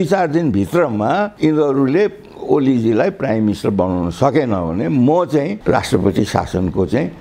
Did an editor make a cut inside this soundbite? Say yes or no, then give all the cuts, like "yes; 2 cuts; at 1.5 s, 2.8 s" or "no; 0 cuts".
no; 0 cuts